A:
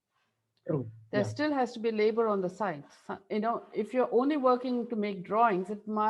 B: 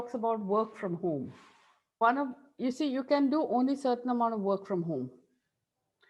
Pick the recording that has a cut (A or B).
B